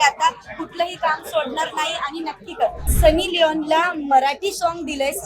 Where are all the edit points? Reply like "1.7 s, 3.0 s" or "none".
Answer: 2.8 s